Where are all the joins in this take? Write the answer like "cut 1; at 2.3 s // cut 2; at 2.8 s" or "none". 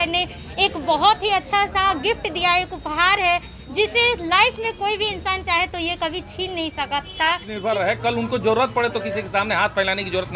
cut 1; at 7.5 s